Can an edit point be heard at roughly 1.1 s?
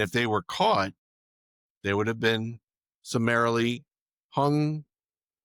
no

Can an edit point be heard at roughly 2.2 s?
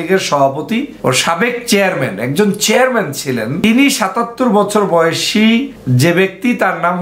no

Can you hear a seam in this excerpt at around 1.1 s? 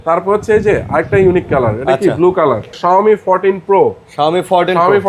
no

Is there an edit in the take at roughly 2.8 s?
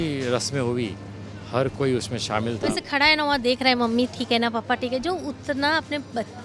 yes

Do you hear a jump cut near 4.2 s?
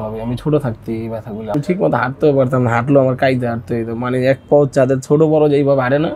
no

